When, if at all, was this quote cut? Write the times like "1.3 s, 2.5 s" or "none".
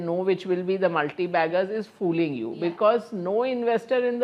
none